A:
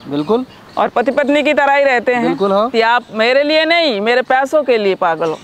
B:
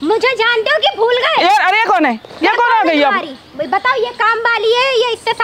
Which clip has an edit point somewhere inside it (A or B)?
A